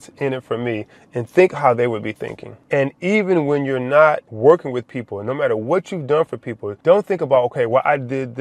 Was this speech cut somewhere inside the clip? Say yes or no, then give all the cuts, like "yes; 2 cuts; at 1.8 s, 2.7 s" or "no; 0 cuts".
no; 0 cuts